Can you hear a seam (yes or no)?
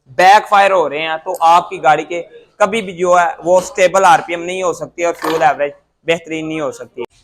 no